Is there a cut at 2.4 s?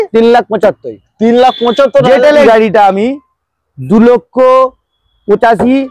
yes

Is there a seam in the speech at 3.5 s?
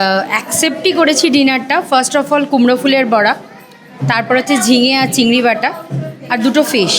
no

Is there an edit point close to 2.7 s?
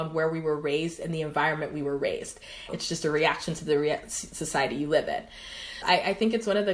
yes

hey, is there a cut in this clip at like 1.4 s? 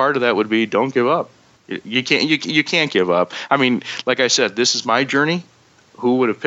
yes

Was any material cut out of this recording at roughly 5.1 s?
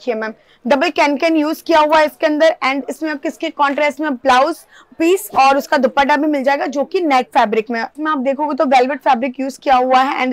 no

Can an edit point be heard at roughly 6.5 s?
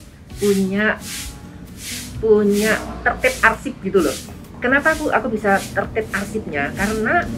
no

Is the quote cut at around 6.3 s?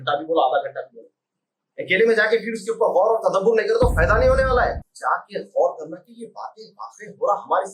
no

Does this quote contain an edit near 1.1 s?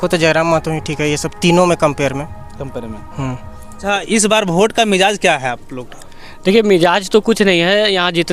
no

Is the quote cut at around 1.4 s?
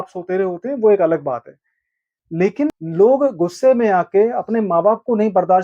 no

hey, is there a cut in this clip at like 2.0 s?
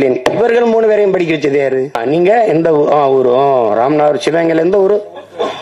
yes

